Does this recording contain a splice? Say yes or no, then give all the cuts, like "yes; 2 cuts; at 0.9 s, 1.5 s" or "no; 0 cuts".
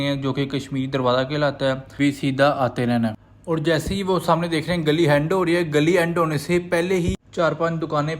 yes; 1 cut; at 1.9 s